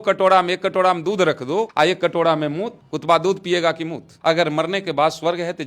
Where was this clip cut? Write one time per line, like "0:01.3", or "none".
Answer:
0:01.7
0:04.2